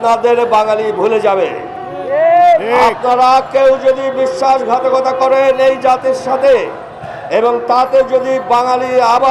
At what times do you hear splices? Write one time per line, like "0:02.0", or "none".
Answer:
none